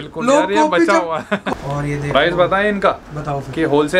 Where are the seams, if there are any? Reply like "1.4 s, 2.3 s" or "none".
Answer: 1.5 s